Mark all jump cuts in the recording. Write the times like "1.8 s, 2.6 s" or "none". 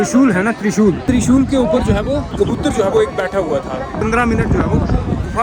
1.0 s, 2.3 s, 4.0 s